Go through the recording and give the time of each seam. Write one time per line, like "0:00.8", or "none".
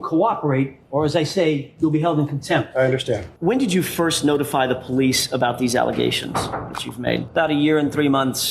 0:03.3
0:07.2